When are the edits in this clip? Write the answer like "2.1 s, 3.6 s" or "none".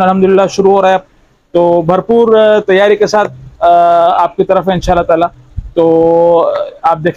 none